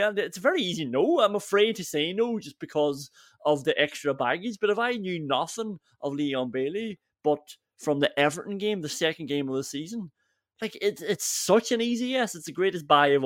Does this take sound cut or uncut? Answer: uncut